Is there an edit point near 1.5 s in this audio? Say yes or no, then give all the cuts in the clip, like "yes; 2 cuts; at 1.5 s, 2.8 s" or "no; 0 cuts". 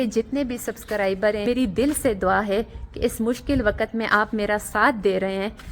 yes; 1 cut; at 1.5 s